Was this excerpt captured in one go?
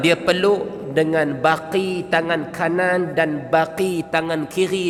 yes; 0 cuts

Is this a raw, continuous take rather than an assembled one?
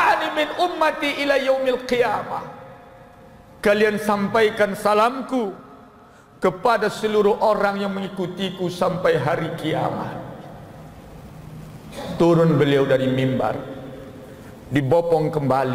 yes; 0 cuts

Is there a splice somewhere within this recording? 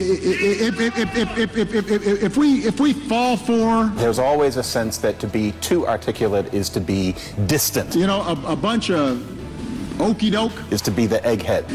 no; 0 cuts

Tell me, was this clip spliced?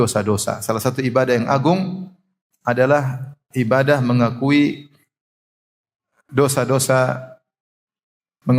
no; 0 cuts

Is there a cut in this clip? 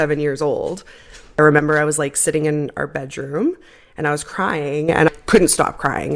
yes; 2 cuts; at 1.2 s, 5.1 s

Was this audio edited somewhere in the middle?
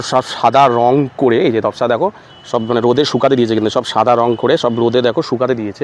no; 0 cuts

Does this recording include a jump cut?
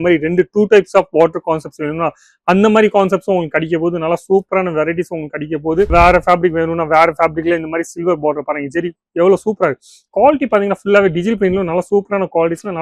yes; 1 cut; at 5.9 s

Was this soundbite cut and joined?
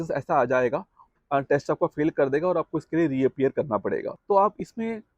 yes; 2 cuts; at 1.1 s, 4.1 s

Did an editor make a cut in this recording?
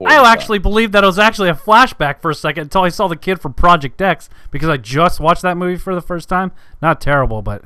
no; 0 cuts

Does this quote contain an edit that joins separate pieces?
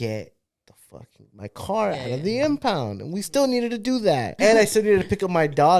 yes; 1 cut; at 4.3 s

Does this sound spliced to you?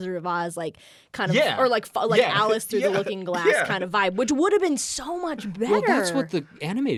no; 0 cuts

